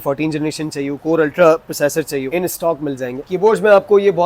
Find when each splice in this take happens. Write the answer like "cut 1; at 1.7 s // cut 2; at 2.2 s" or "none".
cut 1; at 3.2 s